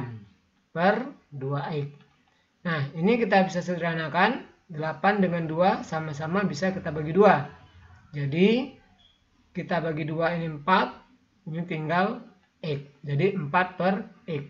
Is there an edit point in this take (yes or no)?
no